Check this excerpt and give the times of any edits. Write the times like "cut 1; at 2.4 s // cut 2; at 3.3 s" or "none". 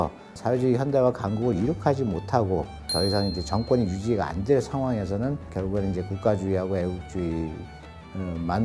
none